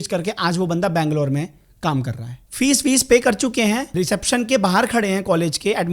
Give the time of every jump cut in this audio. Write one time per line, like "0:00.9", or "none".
0:02.2
0:03.9

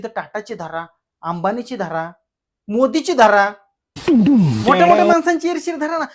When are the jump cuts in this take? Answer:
none

